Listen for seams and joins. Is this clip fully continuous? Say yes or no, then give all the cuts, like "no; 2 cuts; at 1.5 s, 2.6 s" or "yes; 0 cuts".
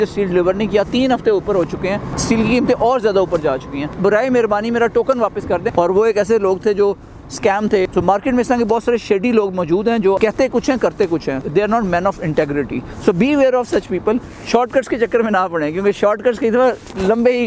no; 8 cuts; at 2.1 s, 3.9 s, 5.7 s, 7.9 s, 10.2 s, 11.4 s, 12.9 s, 14.3 s